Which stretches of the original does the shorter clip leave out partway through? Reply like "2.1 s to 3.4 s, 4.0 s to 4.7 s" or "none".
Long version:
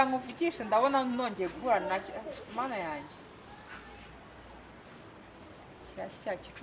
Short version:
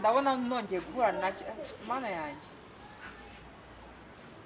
none